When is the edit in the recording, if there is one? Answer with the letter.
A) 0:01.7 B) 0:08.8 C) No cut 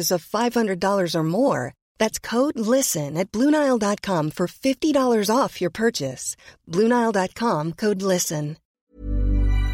B